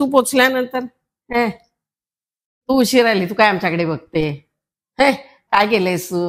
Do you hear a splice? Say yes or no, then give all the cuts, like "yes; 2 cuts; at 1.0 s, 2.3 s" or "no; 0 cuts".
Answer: no; 0 cuts